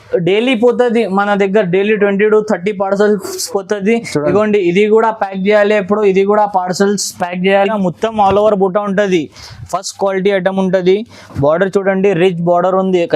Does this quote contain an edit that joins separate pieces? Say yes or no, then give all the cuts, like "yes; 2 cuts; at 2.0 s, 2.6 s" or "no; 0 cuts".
yes; 1 cut; at 7.7 s